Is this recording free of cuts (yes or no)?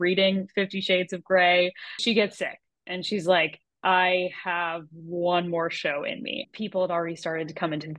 no